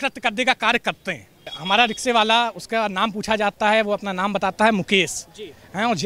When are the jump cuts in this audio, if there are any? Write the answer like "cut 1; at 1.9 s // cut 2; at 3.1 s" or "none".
cut 1; at 1.5 s